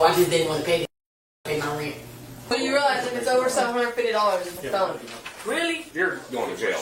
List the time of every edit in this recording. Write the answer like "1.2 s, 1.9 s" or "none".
2.5 s, 5.8 s